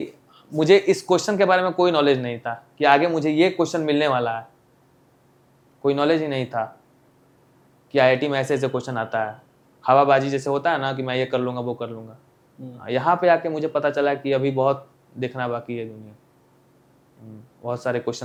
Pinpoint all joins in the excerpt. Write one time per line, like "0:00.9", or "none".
none